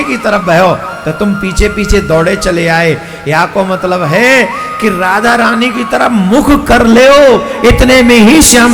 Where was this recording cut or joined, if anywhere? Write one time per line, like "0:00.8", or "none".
none